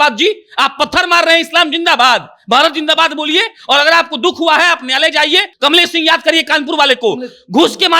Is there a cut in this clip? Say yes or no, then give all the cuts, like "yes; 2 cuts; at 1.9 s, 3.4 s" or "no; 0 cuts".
yes; 1 cut; at 5.5 s